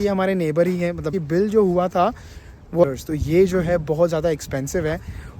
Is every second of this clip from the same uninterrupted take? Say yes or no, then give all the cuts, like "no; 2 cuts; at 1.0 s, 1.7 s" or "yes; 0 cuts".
no; 2 cuts; at 1.2 s, 2.8 s